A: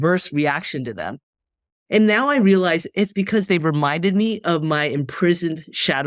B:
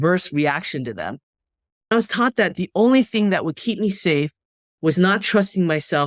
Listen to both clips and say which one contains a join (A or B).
B